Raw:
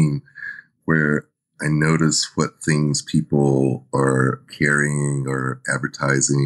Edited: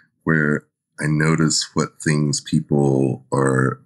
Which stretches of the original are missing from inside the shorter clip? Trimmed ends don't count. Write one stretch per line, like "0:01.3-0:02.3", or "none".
none